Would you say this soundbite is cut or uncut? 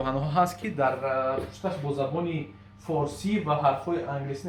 uncut